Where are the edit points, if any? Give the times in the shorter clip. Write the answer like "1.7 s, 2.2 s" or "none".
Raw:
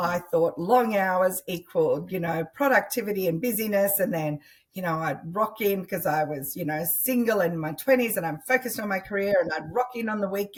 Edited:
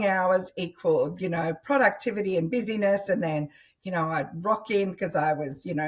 none

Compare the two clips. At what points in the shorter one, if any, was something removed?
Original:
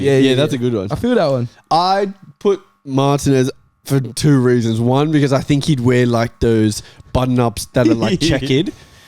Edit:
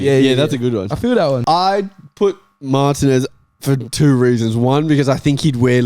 1.4 s

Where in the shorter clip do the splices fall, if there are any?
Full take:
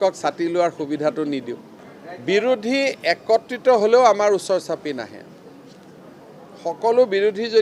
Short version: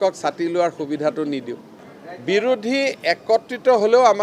none

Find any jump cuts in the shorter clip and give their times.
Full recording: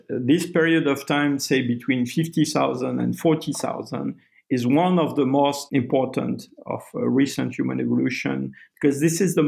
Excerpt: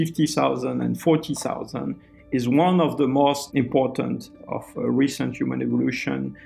none

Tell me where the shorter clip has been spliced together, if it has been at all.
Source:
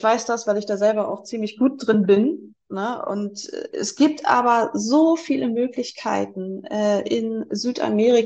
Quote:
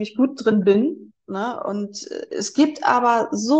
none

